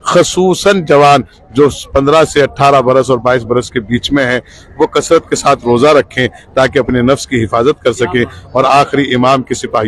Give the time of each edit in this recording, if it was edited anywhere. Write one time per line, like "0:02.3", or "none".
none